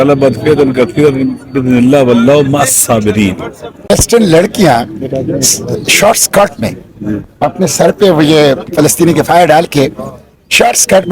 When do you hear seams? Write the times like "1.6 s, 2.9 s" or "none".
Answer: 3.9 s